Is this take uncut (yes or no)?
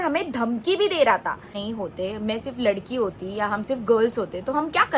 no